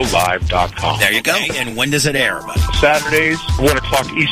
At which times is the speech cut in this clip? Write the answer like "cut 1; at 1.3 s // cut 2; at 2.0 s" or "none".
cut 1; at 1.1 s